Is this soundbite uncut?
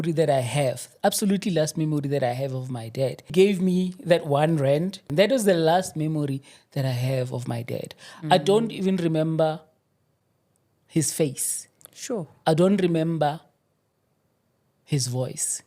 no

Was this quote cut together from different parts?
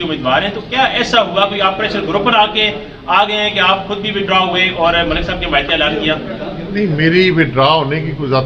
no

